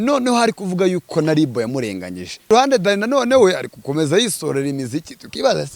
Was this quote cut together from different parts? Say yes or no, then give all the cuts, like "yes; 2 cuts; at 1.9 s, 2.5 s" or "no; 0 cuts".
yes; 1 cut; at 2.5 s